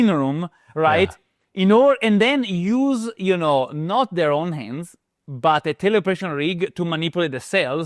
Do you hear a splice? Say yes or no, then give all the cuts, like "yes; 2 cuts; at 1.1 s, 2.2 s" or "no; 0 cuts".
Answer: no; 0 cuts